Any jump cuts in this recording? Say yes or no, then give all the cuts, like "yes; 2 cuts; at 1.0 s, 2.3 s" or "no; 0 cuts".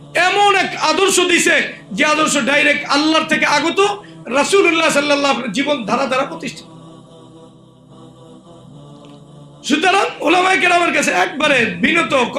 yes; 2 cuts; at 6.8 s, 9.7 s